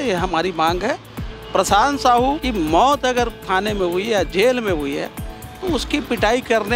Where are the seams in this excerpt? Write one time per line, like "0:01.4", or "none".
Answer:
0:02.4